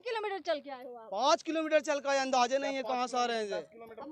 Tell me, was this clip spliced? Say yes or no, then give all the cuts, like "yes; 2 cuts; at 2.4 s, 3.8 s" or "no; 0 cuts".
no; 0 cuts